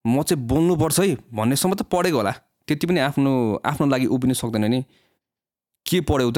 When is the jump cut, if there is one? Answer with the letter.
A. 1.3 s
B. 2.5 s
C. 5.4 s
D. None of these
B